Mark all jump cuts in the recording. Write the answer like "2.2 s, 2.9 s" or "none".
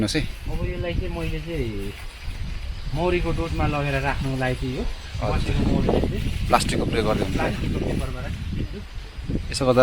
none